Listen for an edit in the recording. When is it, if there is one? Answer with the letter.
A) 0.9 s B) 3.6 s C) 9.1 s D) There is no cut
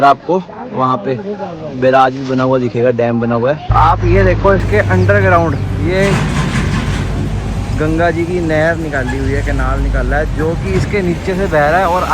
B